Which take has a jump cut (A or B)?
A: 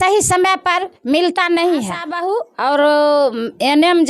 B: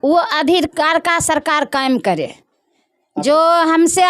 A